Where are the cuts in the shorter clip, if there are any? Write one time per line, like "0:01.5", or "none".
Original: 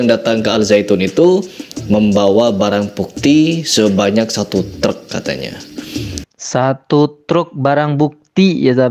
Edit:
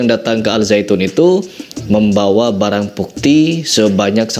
none